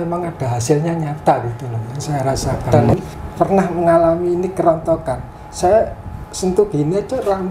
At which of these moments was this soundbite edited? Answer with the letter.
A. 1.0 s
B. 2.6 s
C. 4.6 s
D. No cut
B